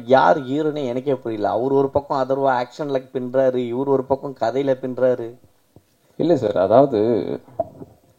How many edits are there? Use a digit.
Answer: 0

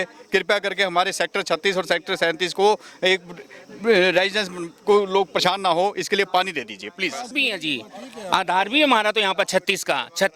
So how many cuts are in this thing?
1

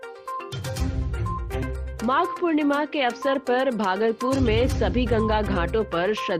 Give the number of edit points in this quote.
1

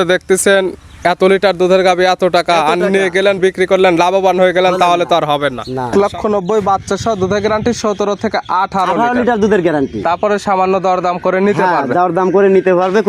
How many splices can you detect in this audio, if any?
1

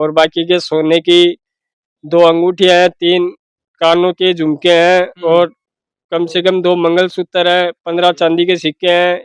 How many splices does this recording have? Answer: 0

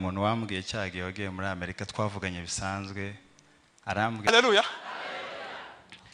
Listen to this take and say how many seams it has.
1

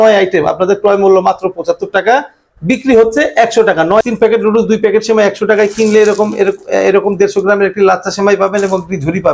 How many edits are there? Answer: 1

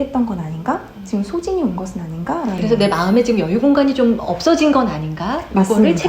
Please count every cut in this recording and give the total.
1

